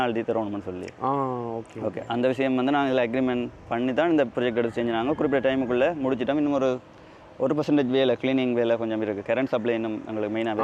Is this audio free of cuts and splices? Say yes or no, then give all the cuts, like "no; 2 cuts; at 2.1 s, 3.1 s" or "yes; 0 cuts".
yes; 0 cuts